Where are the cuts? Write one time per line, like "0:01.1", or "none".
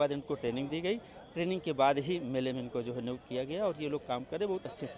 none